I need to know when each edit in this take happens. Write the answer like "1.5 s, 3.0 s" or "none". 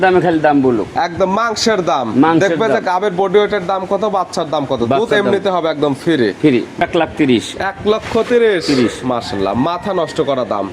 6.8 s